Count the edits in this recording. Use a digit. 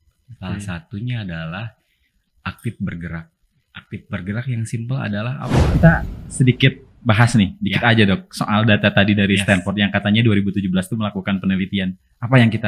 1